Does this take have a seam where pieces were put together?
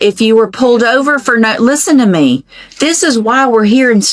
no; 0 cuts

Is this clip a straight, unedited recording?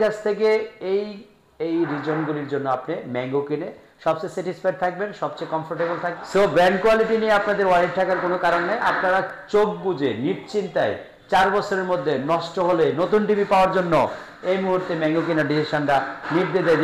no; 1 cut; at 6.2 s

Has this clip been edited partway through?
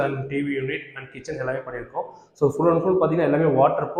no; 0 cuts

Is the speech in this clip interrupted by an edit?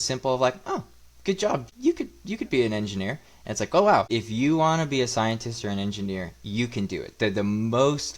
yes; 2 cuts; at 1.7 s, 4.1 s

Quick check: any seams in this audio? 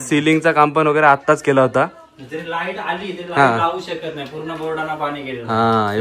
no; 0 cuts

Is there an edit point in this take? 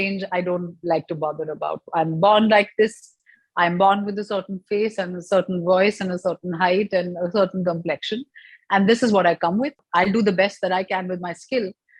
no; 0 cuts

